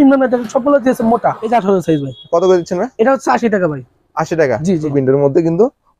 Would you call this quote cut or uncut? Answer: cut